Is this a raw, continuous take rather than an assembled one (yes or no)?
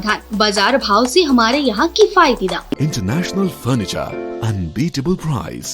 no